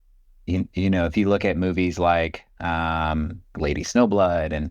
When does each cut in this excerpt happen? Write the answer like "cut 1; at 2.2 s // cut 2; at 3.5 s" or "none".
cut 1; at 3.5 s